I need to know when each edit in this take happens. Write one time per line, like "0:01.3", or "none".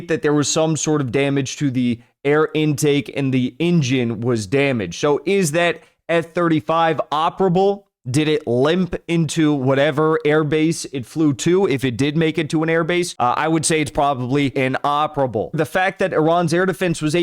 0:13.1
0:14.5
0:15.6